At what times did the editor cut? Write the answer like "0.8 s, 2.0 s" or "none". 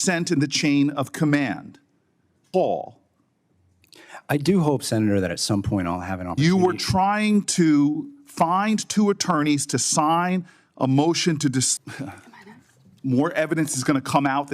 2.4 s, 11.7 s